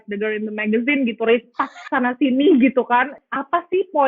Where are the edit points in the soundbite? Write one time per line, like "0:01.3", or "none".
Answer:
0:03.2